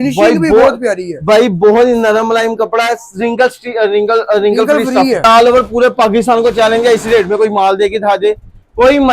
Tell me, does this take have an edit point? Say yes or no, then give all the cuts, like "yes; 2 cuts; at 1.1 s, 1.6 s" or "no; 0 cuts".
yes; 1 cut; at 5.2 s